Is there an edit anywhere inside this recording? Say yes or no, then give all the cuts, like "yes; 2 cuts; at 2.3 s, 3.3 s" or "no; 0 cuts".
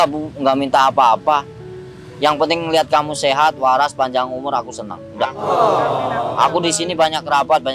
no; 0 cuts